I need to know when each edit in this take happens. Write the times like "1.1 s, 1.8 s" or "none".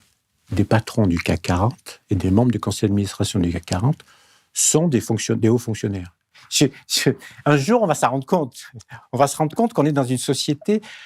6.4 s